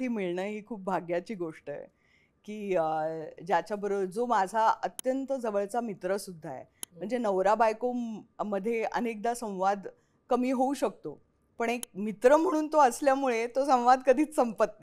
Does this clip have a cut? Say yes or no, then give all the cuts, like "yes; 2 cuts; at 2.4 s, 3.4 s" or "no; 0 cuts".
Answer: no; 0 cuts